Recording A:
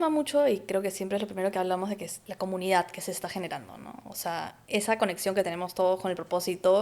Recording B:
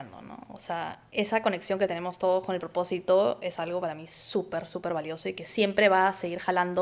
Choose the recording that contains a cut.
A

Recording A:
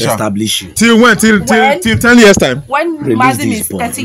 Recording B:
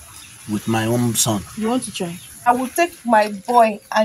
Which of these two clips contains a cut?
B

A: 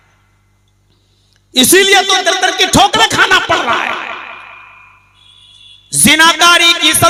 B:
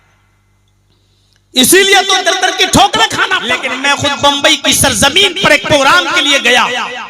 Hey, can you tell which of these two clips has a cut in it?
B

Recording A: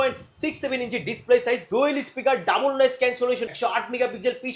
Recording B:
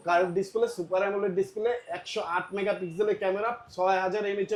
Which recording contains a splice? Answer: A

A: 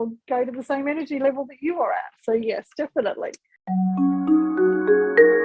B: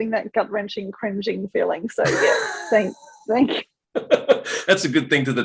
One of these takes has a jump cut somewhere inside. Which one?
A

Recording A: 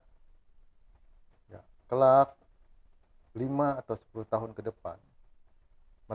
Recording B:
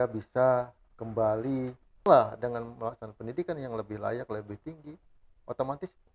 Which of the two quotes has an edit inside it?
B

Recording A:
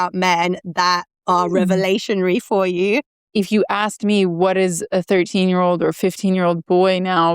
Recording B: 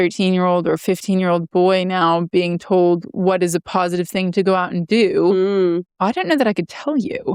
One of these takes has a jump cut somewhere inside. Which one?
A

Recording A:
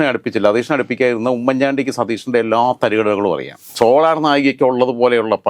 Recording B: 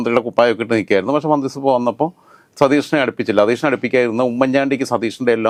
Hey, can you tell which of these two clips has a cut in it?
A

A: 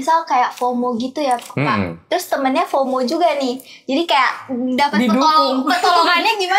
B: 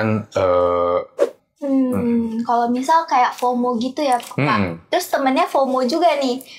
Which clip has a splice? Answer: B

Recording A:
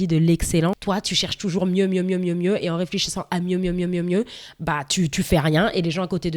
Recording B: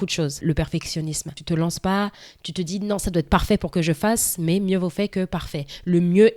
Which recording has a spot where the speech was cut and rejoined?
B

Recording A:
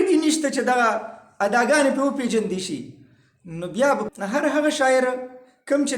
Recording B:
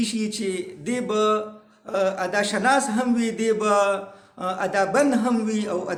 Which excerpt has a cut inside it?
A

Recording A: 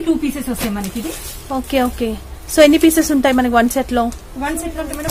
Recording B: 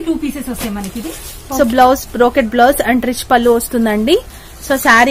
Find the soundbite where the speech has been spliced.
B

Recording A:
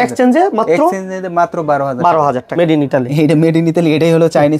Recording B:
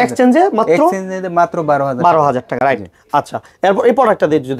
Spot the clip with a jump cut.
A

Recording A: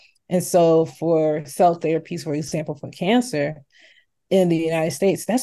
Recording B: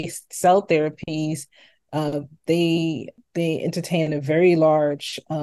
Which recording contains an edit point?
B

